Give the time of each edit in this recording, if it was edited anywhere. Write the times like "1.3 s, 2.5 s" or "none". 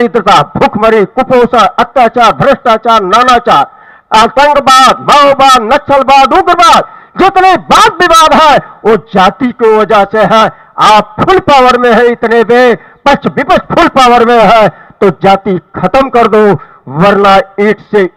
none

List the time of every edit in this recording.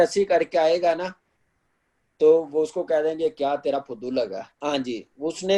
4.5 s

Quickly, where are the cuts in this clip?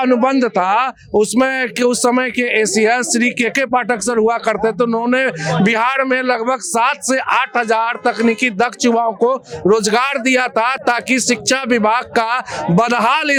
none

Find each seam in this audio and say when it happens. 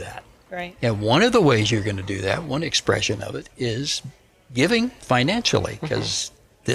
none

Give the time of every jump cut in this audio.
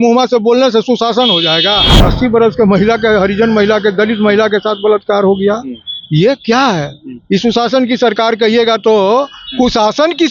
2.1 s

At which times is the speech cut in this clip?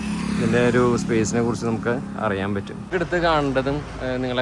2.9 s

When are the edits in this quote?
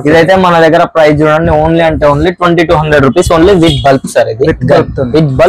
none

